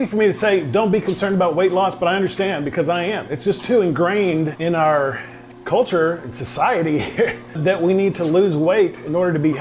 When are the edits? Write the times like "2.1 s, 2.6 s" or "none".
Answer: 4.5 s, 7.6 s